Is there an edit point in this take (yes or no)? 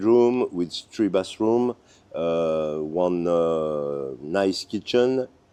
no